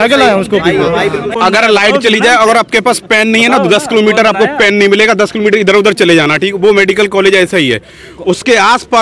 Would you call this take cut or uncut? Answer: cut